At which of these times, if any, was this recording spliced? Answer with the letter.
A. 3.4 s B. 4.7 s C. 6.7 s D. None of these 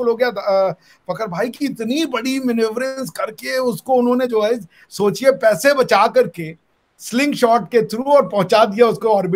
D